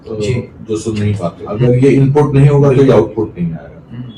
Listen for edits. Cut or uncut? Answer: cut